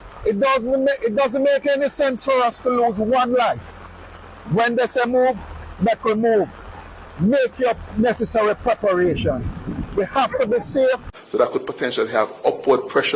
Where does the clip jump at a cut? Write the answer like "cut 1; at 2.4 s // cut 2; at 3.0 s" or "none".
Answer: cut 1; at 11.2 s